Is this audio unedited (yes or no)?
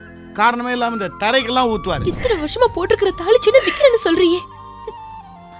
no